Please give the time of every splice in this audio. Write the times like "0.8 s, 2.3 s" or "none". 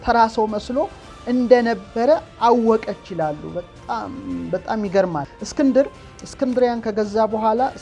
none